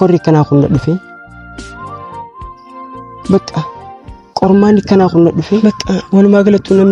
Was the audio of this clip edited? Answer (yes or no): yes